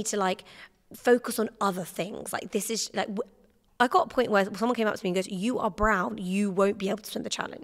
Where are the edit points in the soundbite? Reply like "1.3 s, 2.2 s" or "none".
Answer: none